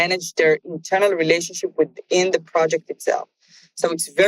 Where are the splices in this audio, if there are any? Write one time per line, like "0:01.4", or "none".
none

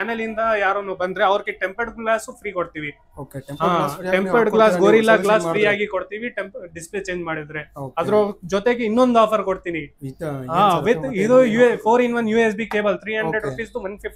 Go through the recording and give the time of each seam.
none

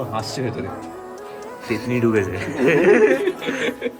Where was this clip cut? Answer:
none

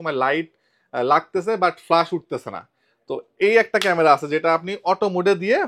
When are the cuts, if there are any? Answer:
none

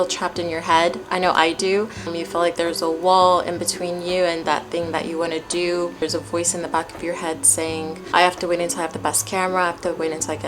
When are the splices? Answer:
0:02.1
0:06.0

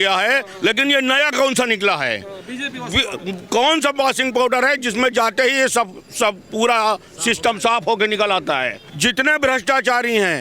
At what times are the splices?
0:08.8

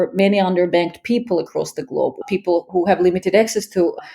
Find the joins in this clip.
0:02.2

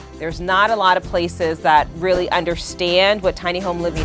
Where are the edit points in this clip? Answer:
none

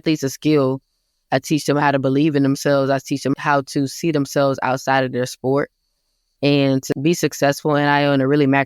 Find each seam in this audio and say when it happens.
0:03.3
0:06.9

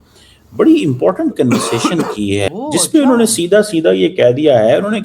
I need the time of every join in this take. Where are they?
0:02.5

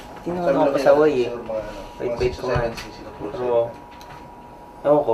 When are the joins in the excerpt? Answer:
none

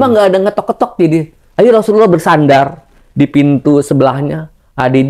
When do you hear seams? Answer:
none

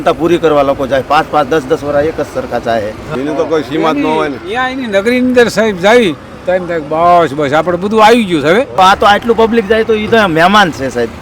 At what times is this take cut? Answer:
0:03.1
0:08.7

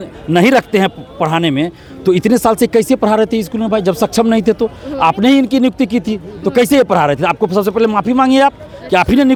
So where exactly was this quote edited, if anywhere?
none

